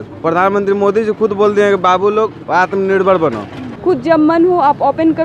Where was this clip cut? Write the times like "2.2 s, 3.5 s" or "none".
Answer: 3.6 s